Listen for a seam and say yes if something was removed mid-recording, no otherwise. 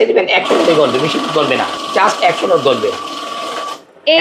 yes